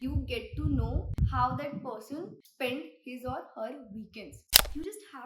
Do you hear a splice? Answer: yes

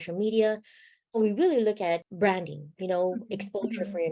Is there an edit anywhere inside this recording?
yes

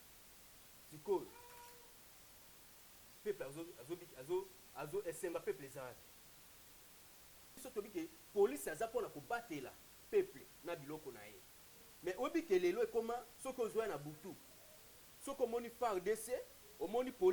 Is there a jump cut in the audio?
yes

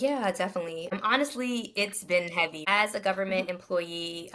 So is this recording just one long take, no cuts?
no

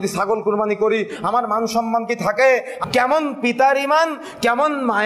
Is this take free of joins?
no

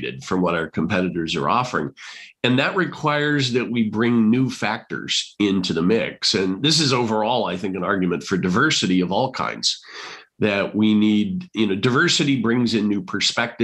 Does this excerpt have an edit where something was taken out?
no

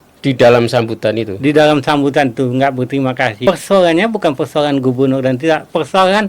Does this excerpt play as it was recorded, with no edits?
no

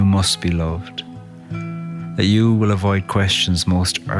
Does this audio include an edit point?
no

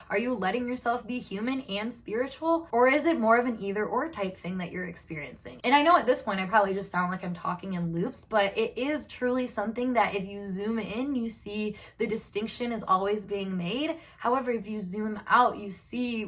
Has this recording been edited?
no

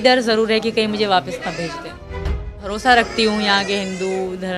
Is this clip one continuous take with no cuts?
no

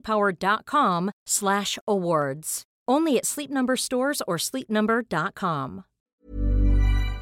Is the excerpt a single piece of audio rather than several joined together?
no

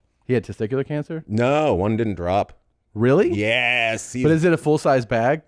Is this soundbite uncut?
yes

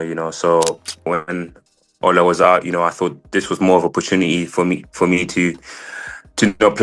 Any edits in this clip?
yes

